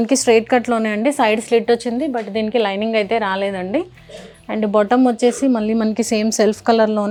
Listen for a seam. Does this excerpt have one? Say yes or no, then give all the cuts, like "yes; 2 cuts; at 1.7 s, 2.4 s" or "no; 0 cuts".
no; 0 cuts